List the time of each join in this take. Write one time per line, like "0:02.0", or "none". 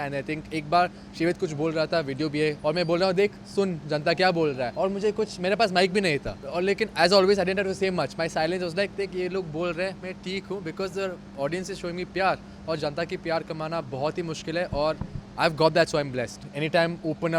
0:02.6
0:04.7
0:06.4
0:16.4